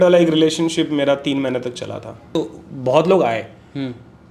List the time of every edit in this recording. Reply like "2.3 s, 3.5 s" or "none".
2.3 s

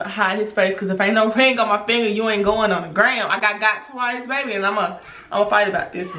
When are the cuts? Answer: none

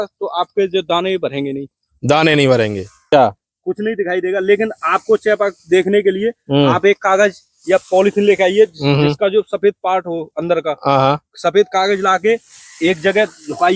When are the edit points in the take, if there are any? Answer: 3.1 s

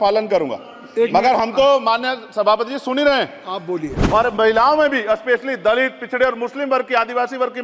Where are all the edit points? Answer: 3.9 s

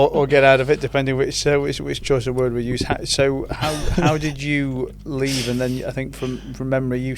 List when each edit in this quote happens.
none

